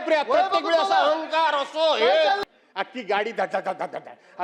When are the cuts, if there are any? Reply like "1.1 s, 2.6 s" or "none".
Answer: 2.4 s